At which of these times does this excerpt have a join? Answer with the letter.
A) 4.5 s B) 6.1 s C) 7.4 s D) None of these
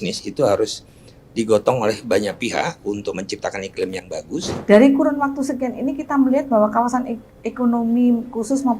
A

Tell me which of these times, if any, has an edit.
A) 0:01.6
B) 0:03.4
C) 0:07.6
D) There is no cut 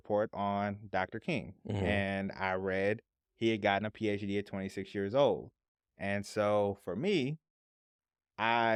D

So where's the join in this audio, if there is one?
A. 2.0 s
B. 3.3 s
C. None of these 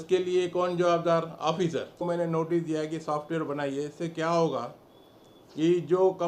A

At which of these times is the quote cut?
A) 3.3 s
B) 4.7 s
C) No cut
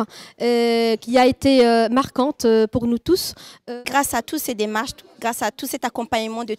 A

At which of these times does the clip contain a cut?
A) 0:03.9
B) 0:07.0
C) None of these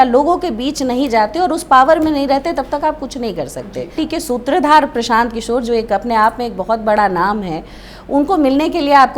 A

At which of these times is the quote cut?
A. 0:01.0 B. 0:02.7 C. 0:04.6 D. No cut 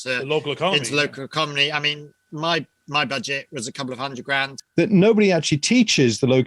C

